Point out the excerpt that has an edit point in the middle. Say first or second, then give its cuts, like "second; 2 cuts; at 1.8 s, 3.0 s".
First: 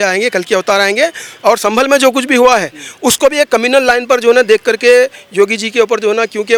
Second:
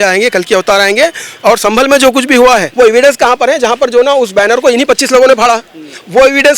second; 1 cut; at 2.7 s